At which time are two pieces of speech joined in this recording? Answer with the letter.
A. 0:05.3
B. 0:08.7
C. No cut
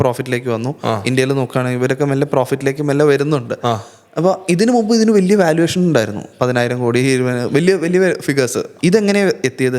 B